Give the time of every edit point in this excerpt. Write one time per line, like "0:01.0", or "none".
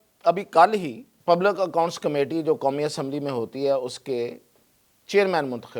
0:01.1